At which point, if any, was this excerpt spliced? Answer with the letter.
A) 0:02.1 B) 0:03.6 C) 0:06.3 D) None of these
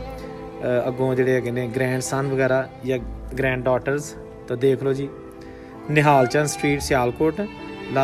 D